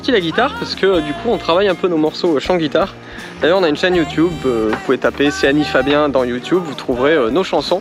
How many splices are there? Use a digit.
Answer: 0